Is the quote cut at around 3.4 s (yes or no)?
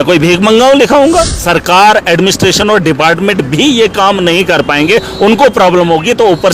no